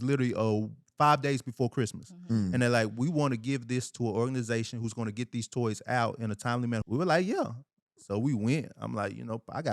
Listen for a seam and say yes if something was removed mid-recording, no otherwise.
yes